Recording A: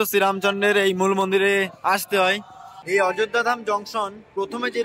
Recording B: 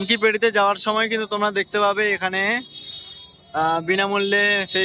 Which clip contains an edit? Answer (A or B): A